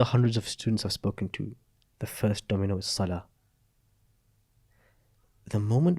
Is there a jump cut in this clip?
no; 0 cuts

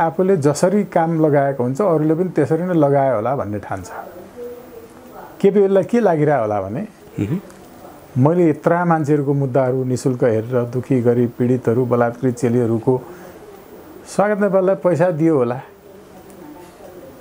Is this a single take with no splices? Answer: yes; 0 cuts

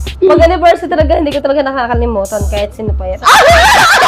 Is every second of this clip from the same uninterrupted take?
yes; 0 cuts

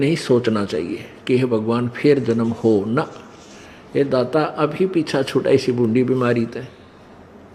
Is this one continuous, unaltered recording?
yes; 0 cuts

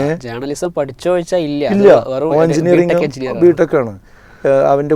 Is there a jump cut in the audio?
no; 0 cuts

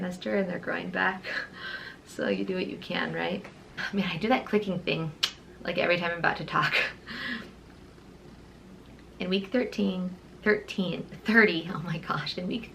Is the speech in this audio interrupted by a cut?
yes; 1 cut; at 3.8 s

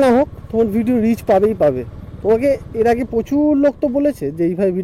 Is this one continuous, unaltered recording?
yes; 0 cuts

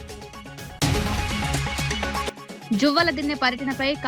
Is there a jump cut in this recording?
yes; 2 cuts; at 0.8 s, 2.3 s

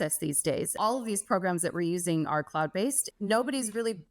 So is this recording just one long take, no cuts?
no; 2 cuts; at 0.8 s, 3.0 s

